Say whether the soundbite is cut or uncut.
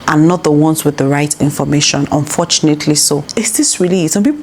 cut